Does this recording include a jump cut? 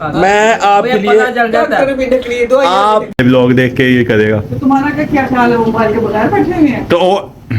yes; 1 cut; at 3.2 s

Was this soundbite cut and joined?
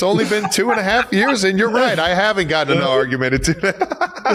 no; 0 cuts

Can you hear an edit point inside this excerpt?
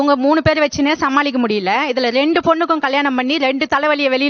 no; 0 cuts

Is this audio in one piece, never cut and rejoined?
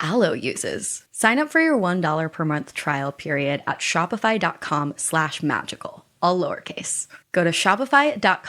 yes; 0 cuts

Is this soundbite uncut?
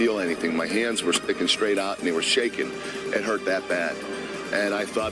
yes; 0 cuts

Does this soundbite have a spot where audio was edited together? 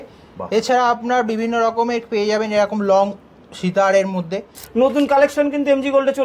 yes; 1 cut; at 4.6 s

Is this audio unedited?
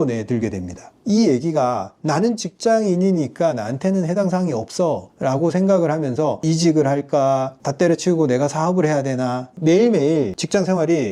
no; 2 cuts; at 0.9 s, 9.5 s

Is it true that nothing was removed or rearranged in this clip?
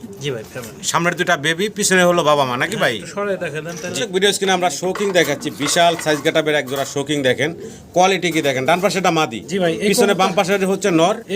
no; 1 cut; at 3.9 s

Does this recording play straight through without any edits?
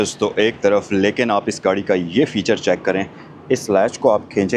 yes; 0 cuts

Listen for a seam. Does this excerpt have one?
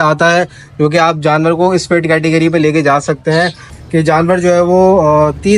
yes; 1 cut; at 3.7 s

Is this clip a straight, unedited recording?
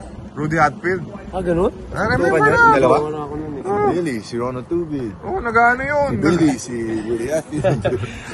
yes; 0 cuts

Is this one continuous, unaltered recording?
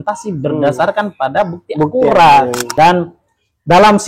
no; 1 cut; at 2.6 s

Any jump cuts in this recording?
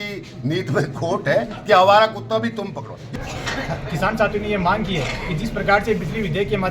yes; 1 cut; at 3.1 s

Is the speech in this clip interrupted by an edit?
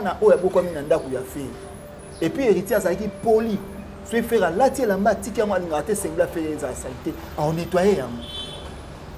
no; 0 cuts

